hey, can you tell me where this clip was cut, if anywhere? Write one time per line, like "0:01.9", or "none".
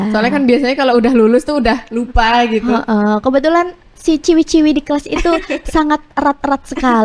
none